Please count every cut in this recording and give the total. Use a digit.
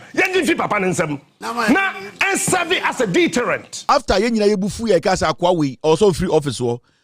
1